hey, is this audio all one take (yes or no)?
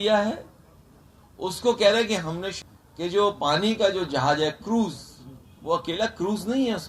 no